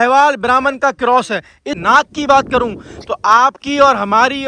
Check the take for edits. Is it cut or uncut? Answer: cut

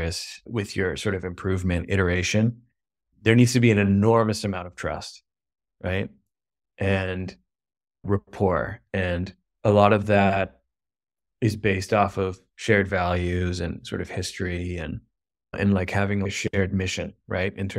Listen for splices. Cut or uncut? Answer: uncut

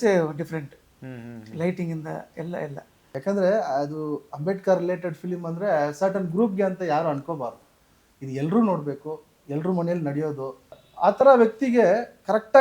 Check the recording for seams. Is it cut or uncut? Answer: cut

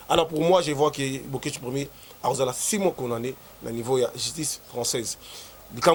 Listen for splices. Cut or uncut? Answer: uncut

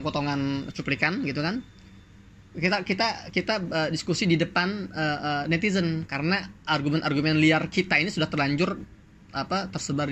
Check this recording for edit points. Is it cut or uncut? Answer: uncut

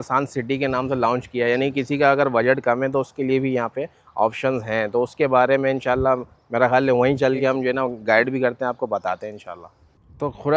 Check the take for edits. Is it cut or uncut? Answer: uncut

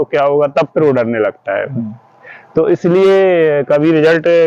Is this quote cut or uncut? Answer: uncut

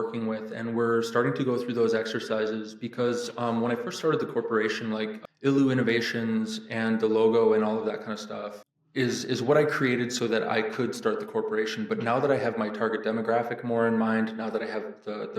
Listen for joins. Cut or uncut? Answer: cut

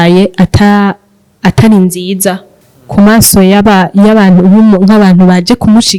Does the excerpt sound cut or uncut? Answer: uncut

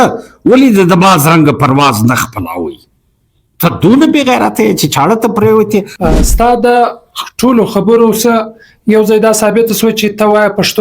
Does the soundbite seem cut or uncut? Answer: cut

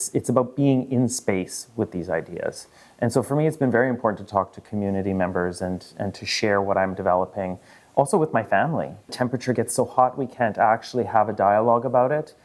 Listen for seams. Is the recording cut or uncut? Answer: cut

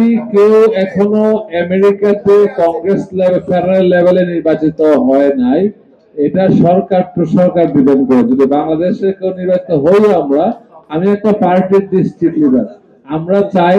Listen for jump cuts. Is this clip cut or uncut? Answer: uncut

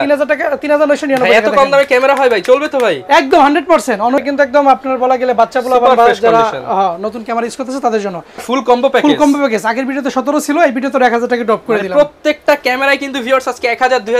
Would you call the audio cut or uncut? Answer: cut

